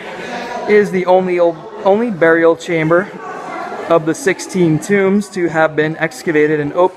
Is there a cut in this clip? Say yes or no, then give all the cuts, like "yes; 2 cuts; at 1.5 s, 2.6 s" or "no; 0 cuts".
yes; 1 cut; at 4.8 s